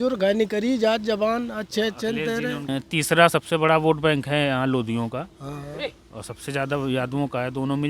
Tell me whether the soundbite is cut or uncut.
cut